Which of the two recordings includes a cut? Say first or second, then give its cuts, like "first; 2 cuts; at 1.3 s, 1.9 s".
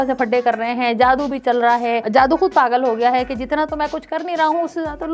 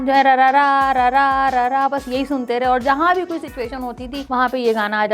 second; 1 cut; at 4.1 s